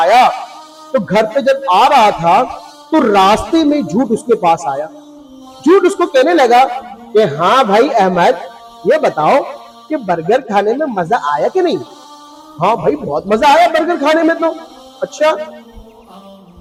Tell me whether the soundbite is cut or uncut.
uncut